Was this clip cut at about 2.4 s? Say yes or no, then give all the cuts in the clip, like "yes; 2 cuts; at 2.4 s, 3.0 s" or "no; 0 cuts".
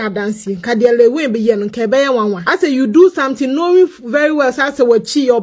yes; 1 cut; at 2.4 s